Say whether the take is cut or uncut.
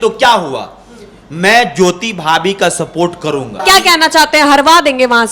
cut